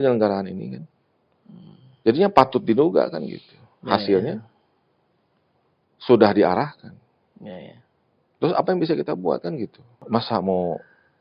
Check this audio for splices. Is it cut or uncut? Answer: cut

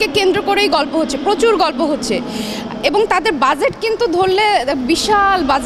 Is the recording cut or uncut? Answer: uncut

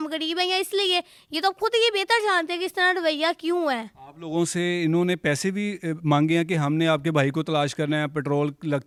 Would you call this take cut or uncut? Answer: uncut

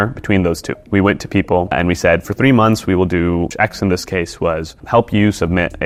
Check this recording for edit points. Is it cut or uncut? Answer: uncut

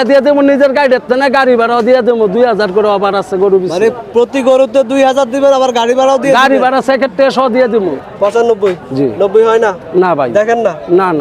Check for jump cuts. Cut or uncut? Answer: cut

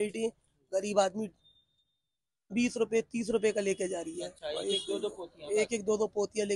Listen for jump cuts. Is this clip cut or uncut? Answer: uncut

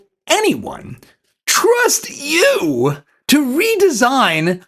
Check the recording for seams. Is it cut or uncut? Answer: uncut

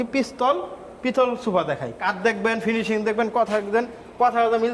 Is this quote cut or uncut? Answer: cut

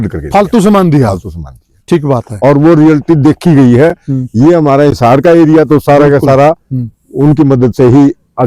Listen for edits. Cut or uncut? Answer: uncut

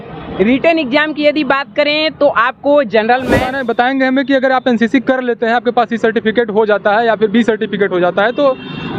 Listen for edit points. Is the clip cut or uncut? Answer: cut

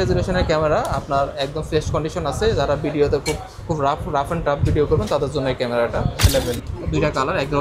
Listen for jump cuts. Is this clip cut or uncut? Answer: cut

